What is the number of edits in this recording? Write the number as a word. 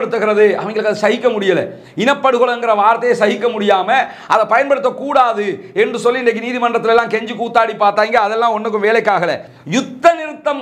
one